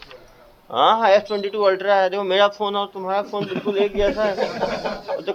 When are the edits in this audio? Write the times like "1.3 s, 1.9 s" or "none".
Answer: none